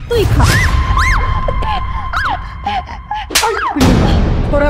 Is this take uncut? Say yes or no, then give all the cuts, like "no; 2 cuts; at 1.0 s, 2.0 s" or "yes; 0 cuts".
yes; 0 cuts